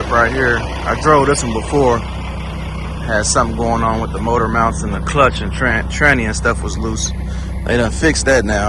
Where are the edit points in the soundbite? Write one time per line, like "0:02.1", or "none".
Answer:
none